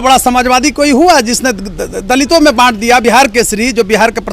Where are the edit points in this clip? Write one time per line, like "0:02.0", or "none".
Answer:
0:03.0